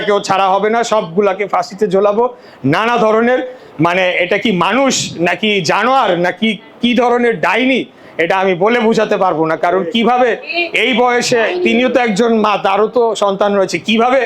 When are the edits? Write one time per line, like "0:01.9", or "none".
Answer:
none